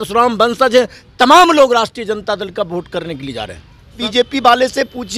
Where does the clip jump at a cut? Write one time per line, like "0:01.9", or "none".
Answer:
0:04.0